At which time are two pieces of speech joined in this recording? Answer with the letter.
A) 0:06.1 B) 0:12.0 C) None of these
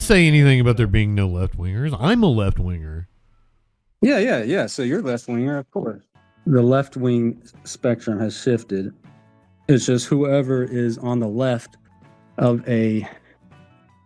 A